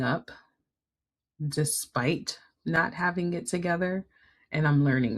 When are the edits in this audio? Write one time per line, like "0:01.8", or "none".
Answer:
none